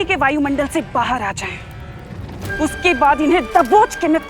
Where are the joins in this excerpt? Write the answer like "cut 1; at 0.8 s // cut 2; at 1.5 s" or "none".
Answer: none

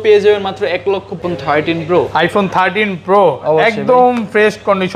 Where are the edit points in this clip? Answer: cut 1; at 1.2 s

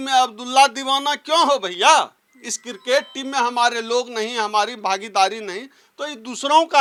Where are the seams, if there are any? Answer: none

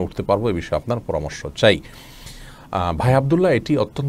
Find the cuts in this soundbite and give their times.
none

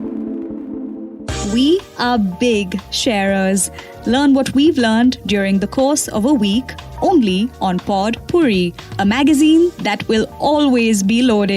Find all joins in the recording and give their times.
cut 1; at 1.0 s

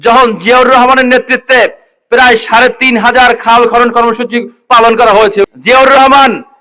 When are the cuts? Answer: cut 1; at 5.5 s

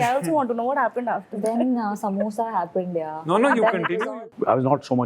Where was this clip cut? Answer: cut 1; at 4.0 s

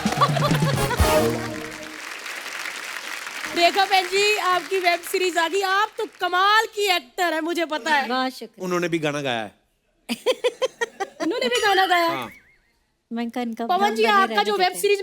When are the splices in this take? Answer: none

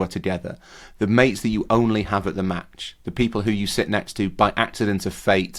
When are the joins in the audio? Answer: none

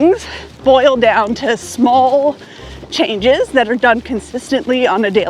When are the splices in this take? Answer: none

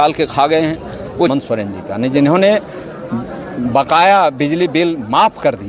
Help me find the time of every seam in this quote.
cut 1; at 1.3 s

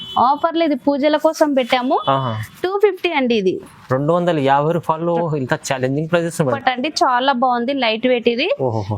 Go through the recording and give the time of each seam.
cut 1; at 6.6 s

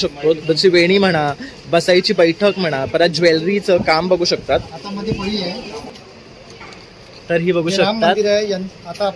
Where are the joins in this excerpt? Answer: cut 1; at 6.0 s

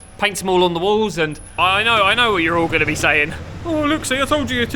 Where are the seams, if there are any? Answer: cut 1; at 1.4 s

